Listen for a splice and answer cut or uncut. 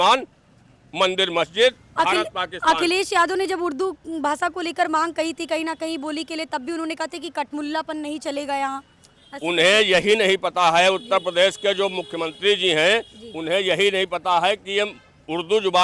uncut